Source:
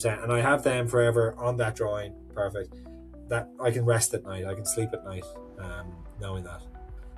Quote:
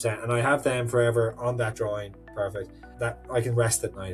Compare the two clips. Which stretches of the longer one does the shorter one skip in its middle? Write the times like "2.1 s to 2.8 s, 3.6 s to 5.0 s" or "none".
2.8 s to 3.1 s